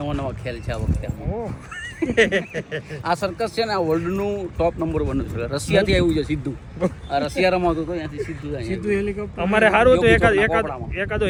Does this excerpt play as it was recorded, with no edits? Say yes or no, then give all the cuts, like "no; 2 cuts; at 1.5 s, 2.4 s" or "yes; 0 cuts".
yes; 0 cuts